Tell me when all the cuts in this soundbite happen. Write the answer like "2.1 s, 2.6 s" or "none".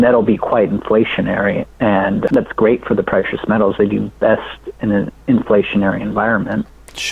2.3 s

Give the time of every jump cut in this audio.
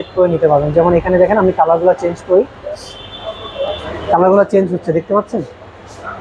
none

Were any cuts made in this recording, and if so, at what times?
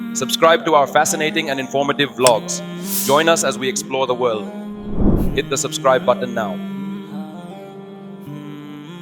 none

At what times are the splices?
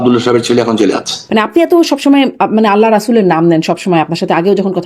1.1 s

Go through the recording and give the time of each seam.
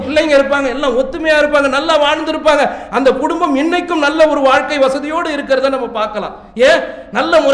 none

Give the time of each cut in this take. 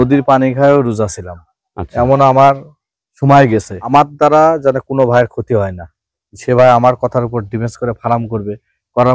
3.9 s

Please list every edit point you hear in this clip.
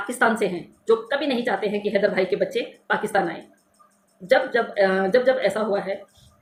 none

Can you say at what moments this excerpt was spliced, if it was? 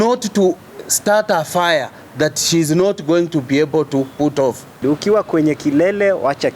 4.8 s

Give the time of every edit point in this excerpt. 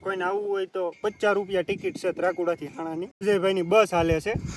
3.2 s

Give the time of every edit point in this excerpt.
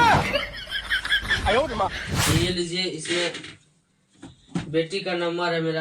2.2 s

